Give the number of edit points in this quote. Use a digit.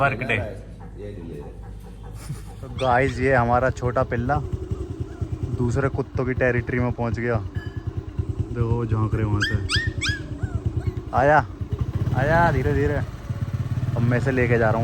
1